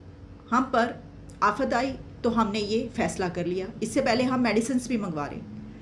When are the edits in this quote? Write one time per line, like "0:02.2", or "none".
none